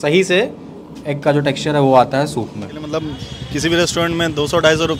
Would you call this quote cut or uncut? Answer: cut